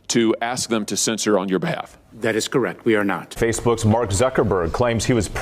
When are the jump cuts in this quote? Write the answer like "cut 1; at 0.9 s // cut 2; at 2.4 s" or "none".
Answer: cut 1; at 3.3 s